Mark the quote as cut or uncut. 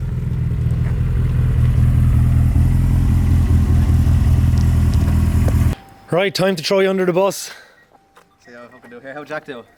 uncut